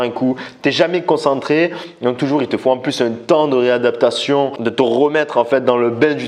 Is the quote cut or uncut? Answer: cut